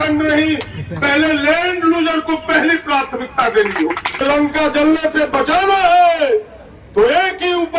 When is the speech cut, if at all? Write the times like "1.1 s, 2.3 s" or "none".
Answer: 4.2 s